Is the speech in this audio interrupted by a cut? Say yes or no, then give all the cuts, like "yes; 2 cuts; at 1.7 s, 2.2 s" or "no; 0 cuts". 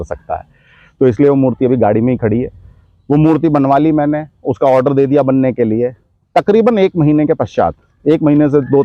no; 0 cuts